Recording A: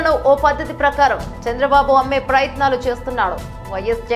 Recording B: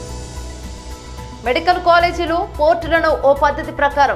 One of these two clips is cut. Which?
B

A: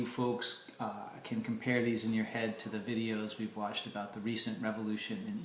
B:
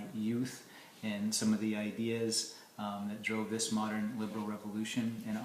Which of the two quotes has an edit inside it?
B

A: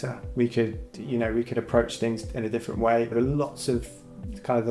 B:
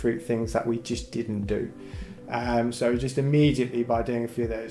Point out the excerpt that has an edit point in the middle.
A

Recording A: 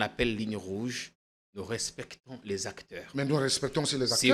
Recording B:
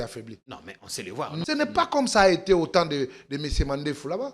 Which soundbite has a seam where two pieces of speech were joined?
B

